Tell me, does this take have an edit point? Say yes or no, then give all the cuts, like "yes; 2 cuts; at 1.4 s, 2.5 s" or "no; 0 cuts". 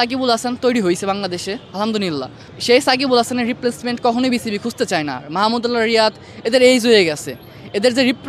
no; 0 cuts